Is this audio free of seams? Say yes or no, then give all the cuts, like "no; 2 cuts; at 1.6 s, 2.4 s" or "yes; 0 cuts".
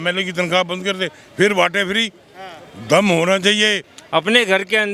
no; 1 cut; at 3.9 s